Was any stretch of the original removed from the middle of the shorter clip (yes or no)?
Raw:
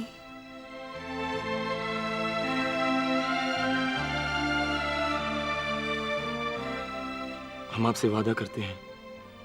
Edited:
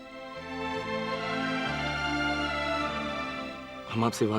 yes